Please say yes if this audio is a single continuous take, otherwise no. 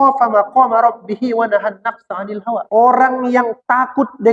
no